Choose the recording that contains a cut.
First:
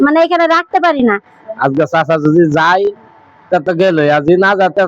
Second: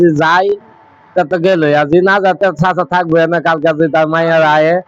first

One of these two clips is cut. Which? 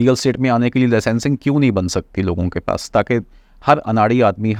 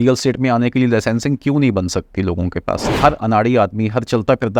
second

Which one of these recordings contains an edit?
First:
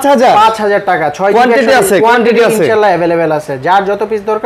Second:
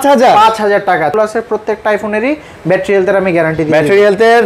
second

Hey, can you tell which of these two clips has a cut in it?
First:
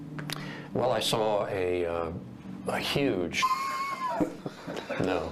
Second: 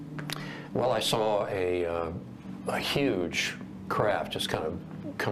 second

